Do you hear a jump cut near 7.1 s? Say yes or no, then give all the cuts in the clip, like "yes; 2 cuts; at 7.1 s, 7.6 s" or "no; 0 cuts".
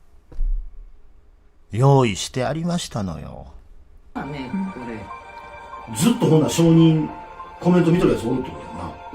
no; 1 cut; at 4.1 s